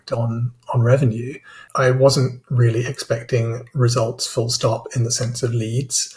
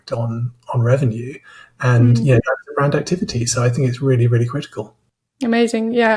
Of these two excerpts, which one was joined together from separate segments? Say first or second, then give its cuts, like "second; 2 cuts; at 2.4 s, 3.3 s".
first; 1 cut; at 1.6 s